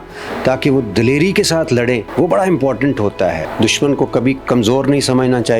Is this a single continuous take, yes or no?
no